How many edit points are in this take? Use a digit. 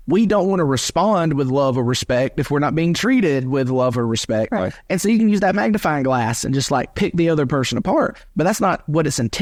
0